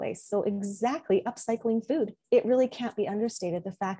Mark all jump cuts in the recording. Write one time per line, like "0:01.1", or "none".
0:02.2